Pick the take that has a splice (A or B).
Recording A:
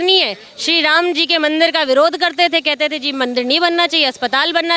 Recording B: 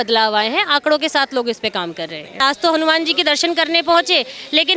B